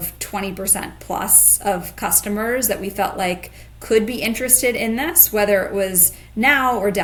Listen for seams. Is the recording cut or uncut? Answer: uncut